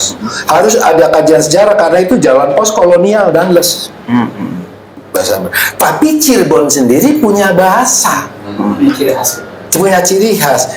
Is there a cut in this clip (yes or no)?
yes